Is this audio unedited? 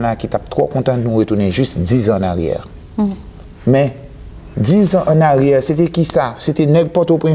yes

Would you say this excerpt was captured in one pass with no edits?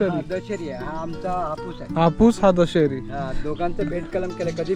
yes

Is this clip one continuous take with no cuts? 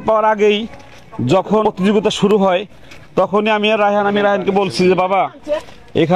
no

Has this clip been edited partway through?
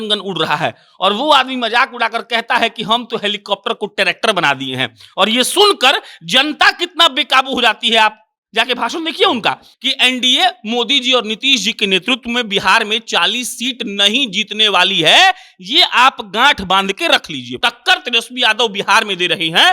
yes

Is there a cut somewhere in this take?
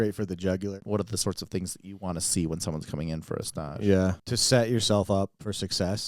yes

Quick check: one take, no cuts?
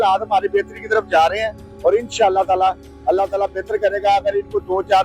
yes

